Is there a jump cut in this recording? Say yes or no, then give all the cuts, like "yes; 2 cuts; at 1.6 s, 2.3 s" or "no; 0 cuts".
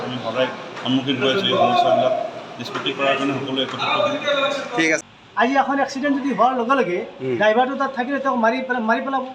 yes; 1 cut; at 5.0 s